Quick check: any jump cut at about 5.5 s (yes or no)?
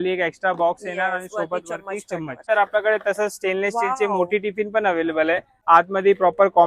yes